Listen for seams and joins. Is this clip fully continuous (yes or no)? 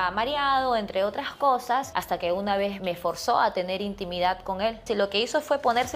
no